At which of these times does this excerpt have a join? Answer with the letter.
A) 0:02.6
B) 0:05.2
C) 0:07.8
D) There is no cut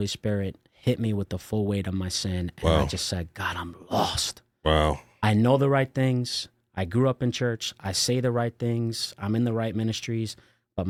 D